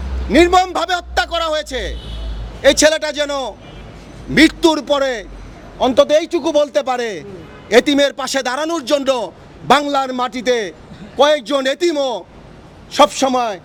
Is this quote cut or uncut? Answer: uncut